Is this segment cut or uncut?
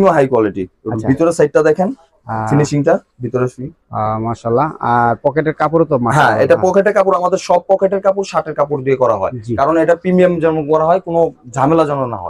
uncut